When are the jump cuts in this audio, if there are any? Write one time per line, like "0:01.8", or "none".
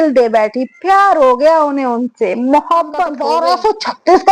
0:03.2